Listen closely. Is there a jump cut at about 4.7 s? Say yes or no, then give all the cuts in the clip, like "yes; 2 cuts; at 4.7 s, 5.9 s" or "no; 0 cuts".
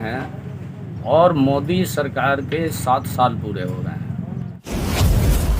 yes; 1 cut; at 4.7 s